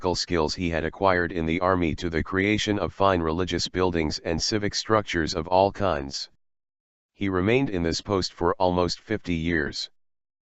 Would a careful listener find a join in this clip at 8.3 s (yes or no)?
no